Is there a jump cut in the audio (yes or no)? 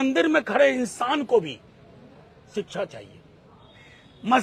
no